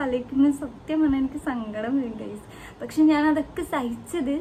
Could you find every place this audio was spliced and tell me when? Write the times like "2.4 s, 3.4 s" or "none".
none